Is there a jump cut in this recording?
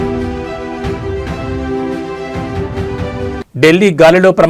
no; 0 cuts

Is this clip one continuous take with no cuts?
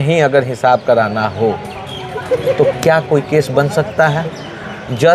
yes; 0 cuts

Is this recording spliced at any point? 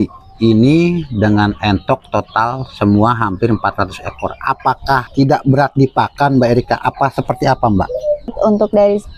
yes; 2 cuts; at 5.1 s, 8.3 s

